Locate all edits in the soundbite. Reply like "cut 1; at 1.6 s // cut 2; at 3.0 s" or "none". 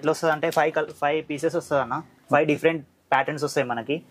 none